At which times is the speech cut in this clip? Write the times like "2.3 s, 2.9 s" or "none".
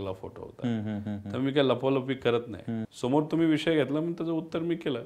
none

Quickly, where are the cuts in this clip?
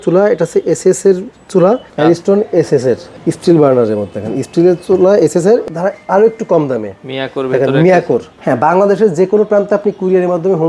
1.9 s, 3.1 s, 5.6 s, 8.3 s

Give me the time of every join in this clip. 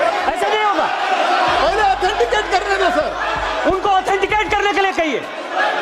none

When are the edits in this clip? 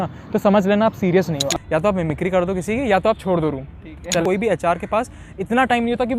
1.5 s, 4.2 s

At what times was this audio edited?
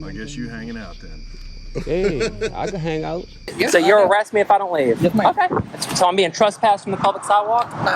3.4 s

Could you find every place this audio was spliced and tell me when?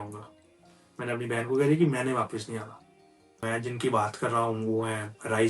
3.4 s

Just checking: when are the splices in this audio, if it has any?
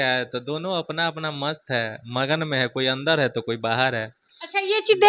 none

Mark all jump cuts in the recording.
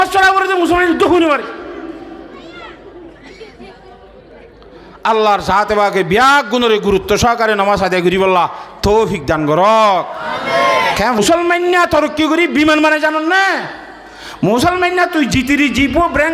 11.2 s

